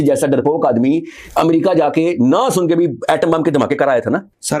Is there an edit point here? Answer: no; 0 cuts

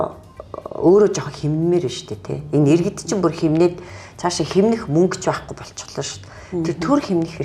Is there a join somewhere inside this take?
no; 0 cuts

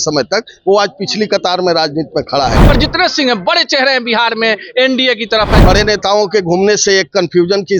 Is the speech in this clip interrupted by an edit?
yes; 2 cuts; at 2.6 s, 5.6 s

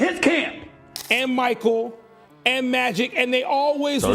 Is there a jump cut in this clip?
yes; 1 cut; at 0.9 s

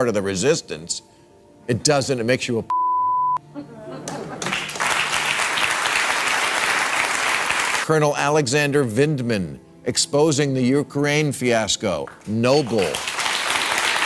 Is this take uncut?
no; 1 cut; at 7.5 s

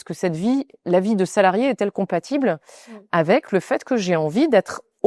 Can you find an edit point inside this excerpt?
no; 0 cuts

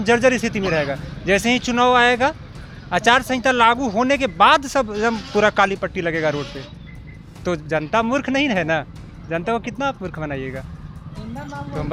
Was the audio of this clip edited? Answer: no; 0 cuts

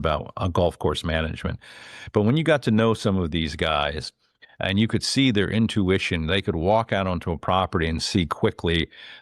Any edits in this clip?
no; 0 cuts

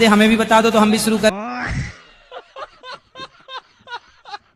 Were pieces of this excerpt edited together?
yes; 1 cut; at 1.3 s

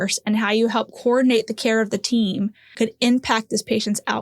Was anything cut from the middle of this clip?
yes; 1 cut; at 2.6 s

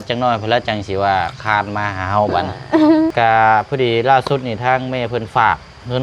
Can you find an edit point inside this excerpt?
yes; 1 cut; at 3.1 s

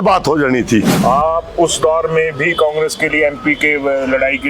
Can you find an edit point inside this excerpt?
yes; 1 cut; at 0.9 s

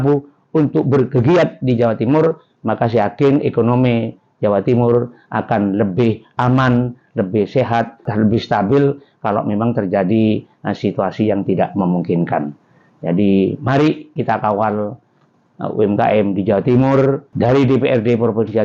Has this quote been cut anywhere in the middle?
yes; 2 cuts; at 8.1 s, 17.3 s

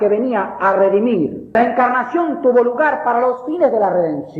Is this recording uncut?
no; 1 cut; at 1.6 s

